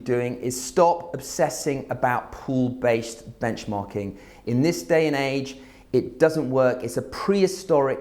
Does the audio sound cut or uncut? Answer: uncut